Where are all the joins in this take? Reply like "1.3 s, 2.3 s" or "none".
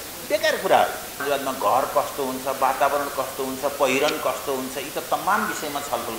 1.2 s